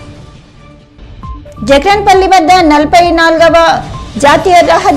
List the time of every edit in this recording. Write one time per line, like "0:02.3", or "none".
0:00.9